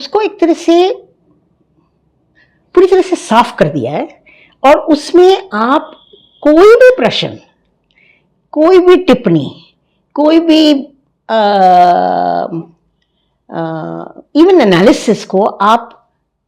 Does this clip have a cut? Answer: no; 0 cuts

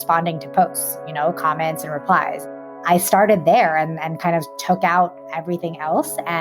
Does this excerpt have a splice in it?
yes; 1 cut; at 2.5 s

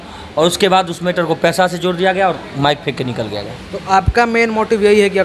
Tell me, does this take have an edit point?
no; 0 cuts

